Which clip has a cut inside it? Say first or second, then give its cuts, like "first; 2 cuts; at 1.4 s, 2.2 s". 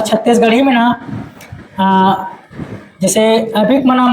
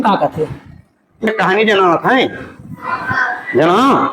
second; 1 cut; at 1.3 s